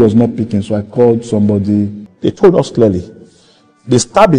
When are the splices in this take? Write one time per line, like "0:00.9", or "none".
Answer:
0:02.0